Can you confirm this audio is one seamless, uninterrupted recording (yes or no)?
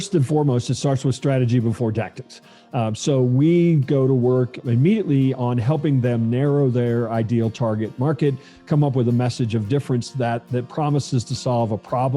no